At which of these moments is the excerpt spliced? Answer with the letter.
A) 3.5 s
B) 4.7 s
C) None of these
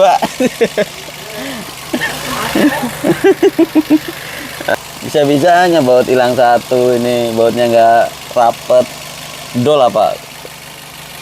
B